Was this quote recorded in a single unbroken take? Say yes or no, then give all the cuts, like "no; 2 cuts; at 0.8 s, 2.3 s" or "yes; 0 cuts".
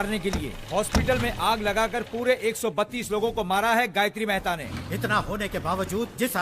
no; 1 cut; at 4.6 s